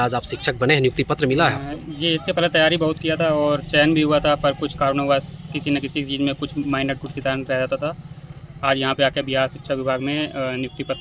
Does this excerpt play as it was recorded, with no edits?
yes; 0 cuts

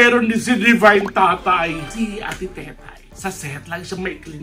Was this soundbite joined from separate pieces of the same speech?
yes; 1 cut; at 1.9 s

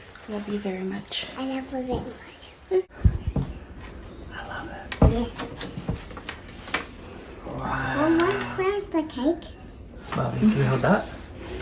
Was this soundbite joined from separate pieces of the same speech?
yes; 1 cut; at 2.9 s

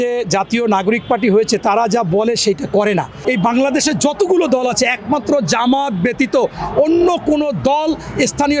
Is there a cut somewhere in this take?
yes; 1 cut; at 3.2 s

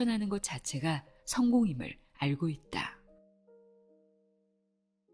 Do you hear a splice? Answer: no; 0 cuts

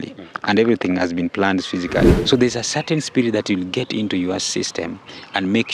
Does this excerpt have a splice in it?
yes; 1 cut; at 2.2 s

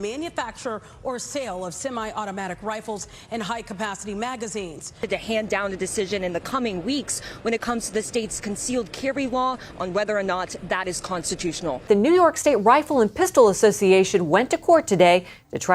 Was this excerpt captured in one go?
no; 2 cuts; at 5.0 s, 11.8 s

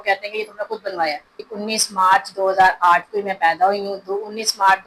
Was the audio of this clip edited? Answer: yes; 1 cut; at 1.5 s

